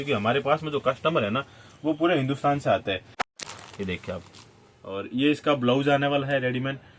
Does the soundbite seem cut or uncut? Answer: cut